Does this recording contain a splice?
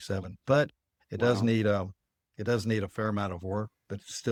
no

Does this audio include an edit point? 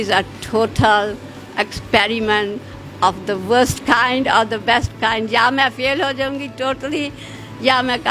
no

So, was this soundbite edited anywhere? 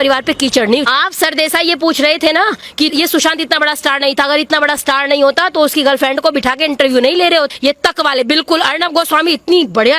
yes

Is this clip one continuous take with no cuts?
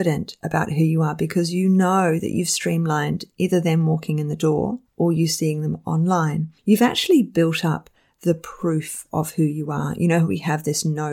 yes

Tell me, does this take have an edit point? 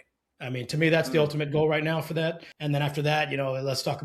yes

